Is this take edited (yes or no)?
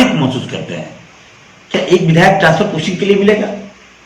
no